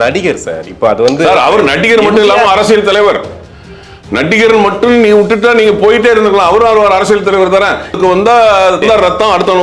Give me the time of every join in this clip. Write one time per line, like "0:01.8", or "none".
0:08.0